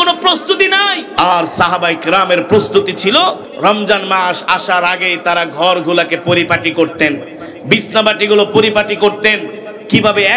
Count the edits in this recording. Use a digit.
2